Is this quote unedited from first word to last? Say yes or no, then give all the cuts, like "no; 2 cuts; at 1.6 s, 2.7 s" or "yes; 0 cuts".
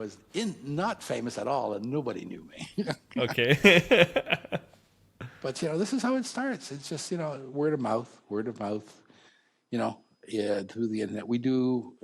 yes; 0 cuts